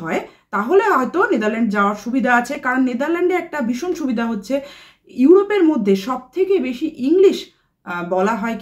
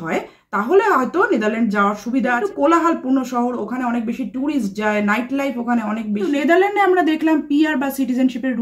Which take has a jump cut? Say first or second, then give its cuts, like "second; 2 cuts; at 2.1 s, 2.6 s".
second; 2 cuts; at 2.4 s, 6.3 s